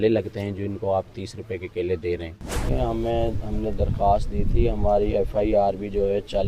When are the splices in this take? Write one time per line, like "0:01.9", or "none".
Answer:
0:02.8